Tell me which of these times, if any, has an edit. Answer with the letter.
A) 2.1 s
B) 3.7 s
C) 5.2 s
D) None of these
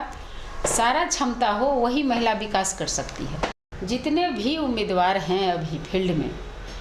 B